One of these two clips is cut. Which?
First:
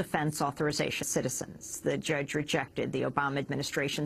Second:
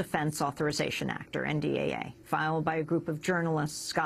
second; 1 cut; at 1.0 s

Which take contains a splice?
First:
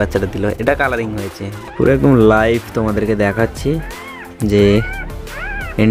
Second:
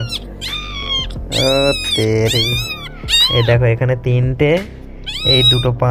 first; 1 cut; at 1.5 s

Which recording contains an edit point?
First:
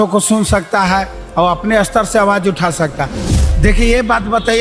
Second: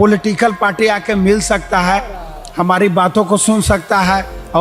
first; 1 cut; at 3.3 s

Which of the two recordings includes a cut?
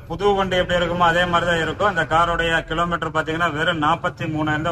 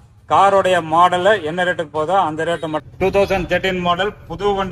second; 1 cut; at 2.8 s

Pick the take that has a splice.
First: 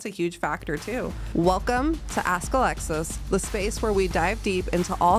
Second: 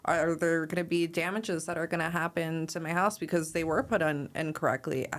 first; 1 cut; at 1.2 s

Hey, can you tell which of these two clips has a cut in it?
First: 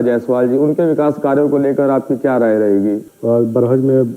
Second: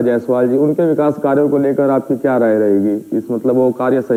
first; 1 cut; at 3.1 s

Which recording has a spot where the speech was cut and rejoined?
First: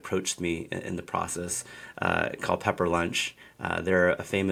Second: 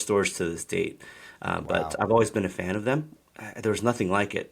second; 1 cut; at 3.2 s

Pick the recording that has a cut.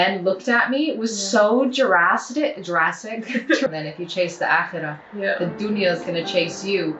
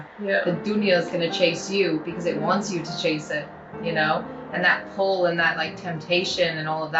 first; 1 cut; at 3.7 s

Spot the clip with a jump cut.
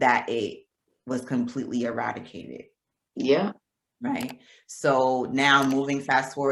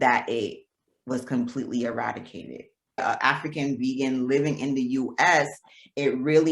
second; 1 cut; at 3.0 s

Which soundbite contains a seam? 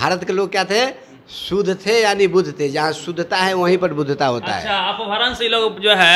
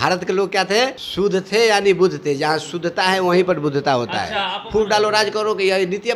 second; 2 cuts; at 1.0 s, 4.6 s

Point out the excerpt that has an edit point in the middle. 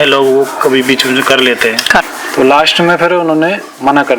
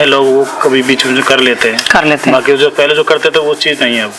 first; 1 cut; at 2.0 s

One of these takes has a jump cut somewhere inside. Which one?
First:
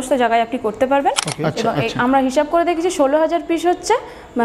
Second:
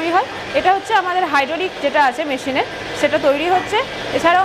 first; 1 cut; at 1.3 s

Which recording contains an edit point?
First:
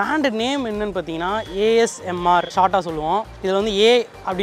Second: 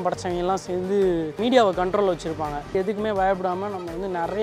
second; 2 cuts; at 1.4 s, 2.7 s

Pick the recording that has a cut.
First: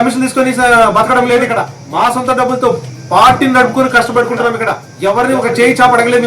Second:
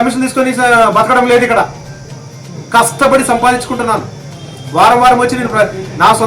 first; 2 cuts; at 1.8 s, 4.8 s

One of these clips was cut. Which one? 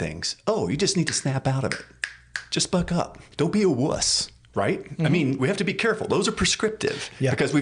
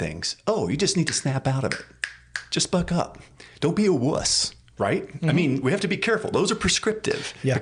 first; 1 cut; at 3.2 s

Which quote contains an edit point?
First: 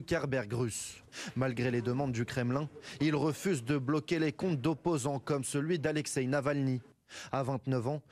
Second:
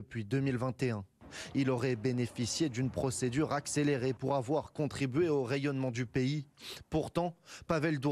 second; 2 cuts; at 2.1 s, 7.1 s

